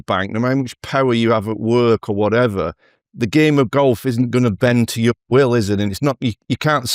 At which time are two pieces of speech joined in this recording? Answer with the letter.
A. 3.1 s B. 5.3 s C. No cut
C